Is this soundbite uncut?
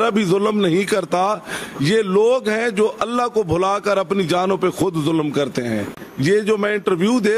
no; 1 cut; at 6.0 s

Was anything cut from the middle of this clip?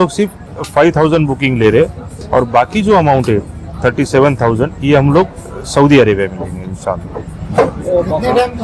no; 0 cuts

